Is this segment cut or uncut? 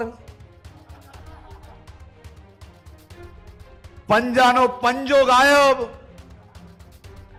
uncut